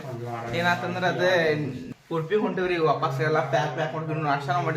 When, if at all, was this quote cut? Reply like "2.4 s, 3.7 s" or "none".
1.8 s

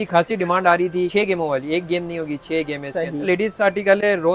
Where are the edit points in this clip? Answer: 1.1 s, 3.3 s

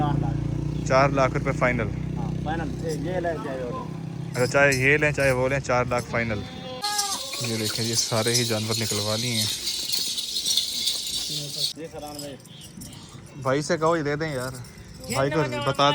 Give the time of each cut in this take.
6.8 s, 11.7 s

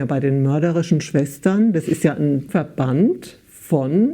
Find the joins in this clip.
2.5 s

